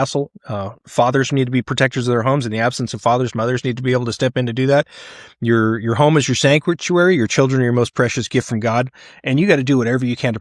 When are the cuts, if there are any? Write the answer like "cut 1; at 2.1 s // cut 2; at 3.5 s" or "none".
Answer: none